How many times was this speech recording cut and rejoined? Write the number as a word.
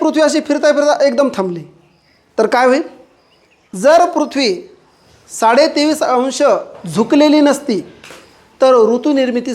one